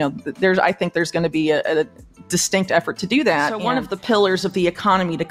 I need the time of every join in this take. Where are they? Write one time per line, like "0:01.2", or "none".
0:03.7